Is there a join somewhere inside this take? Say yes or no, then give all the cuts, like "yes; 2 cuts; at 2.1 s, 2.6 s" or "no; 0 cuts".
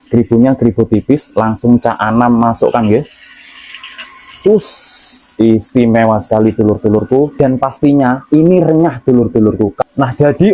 yes; 2 cuts; at 7.3 s, 9.8 s